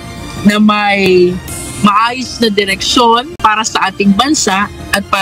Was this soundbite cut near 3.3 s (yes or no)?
yes